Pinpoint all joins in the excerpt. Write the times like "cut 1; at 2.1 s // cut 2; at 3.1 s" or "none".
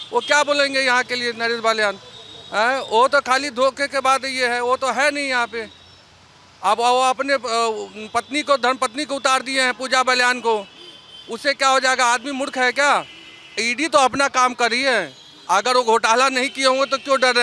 cut 1; at 13.4 s